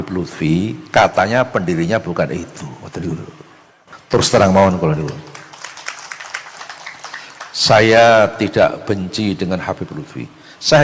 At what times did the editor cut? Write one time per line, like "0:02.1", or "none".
0:03.9